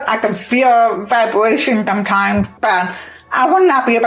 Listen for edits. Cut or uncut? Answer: uncut